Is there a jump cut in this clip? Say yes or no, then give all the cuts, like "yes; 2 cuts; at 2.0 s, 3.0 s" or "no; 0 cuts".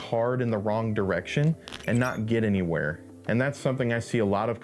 no; 0 cuts